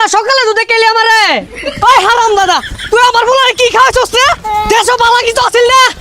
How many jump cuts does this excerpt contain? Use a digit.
1